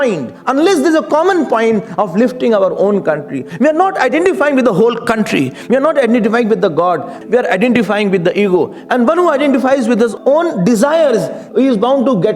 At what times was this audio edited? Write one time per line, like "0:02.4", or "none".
0:03.5
0:07.2
0:11.4